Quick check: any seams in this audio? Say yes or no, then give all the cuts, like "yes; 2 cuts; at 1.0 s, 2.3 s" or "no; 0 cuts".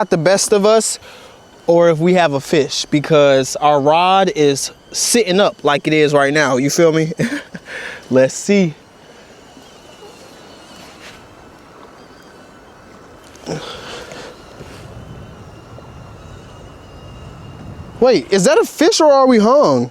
no; 0 cuts